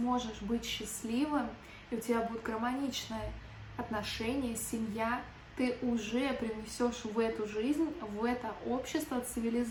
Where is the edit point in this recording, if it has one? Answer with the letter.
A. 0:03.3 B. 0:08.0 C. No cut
C